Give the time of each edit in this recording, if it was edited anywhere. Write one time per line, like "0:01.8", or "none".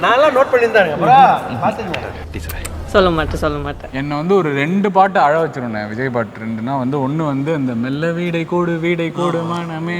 0:03.9

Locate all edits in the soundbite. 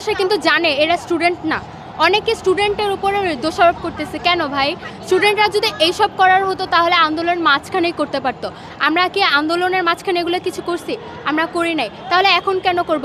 none

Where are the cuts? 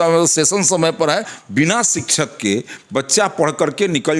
0:01.4

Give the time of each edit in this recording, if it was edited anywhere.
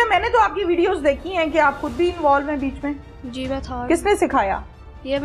none

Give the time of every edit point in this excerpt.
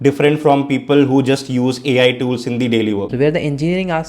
0:03.1

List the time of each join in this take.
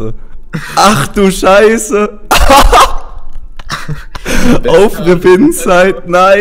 none

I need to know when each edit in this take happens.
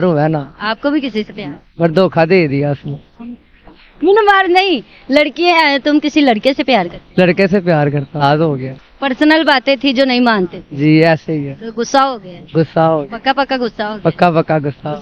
0:03.8
0:08.2

